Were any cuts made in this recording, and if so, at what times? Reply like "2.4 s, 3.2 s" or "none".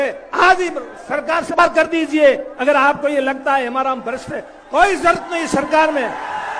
1.6 s